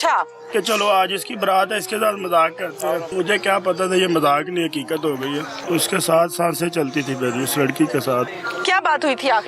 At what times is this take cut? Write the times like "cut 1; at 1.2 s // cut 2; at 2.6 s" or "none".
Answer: cut 1; at 3.1 s // cut 2; at 5.5 s // cut 3; at 8.3 s